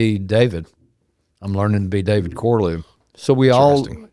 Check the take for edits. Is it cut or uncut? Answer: cut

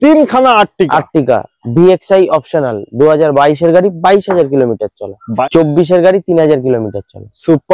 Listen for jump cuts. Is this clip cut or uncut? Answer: cut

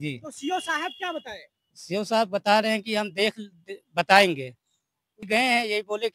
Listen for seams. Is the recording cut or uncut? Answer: cut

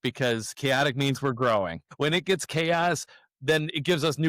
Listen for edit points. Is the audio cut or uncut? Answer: cut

